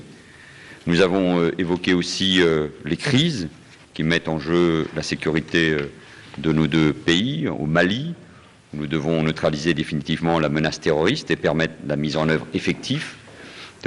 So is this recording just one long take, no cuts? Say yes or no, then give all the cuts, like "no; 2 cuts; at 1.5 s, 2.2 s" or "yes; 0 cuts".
no; 1 cut; at 3.4 s